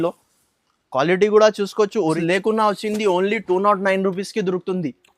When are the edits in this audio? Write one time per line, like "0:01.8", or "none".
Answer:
0:02.2